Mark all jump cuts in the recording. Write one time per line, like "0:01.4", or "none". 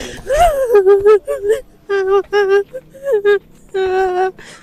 none